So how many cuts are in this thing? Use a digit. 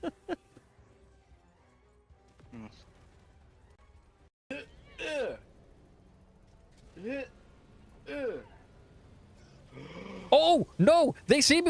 1